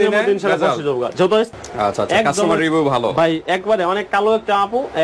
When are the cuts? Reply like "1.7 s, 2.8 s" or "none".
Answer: 1.5 s